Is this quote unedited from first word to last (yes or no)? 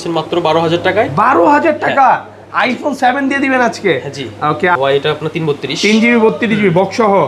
no